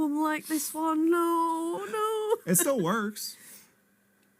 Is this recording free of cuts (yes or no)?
yes